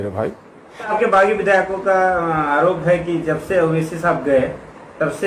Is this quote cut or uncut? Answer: cut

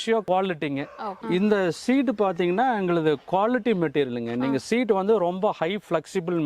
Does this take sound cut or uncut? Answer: cut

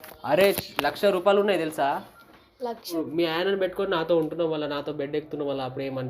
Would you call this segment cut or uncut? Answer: cut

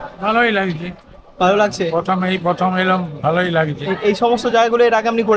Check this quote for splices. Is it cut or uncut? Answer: uncut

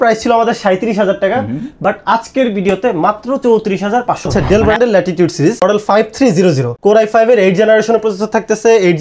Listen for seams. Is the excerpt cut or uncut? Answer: cut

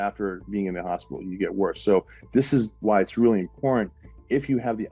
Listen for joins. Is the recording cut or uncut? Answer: uncut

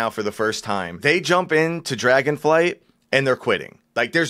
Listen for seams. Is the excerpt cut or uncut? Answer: cut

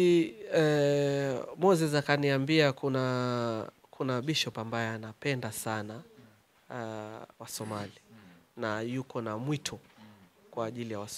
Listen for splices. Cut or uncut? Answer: uncut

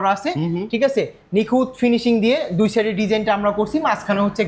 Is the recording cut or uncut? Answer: uncut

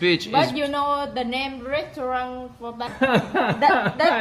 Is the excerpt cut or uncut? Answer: cut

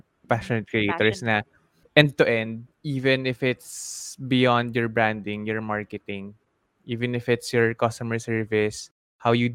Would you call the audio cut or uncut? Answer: uncut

